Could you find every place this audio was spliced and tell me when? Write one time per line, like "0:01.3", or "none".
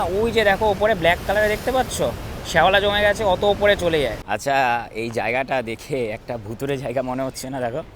0:04.3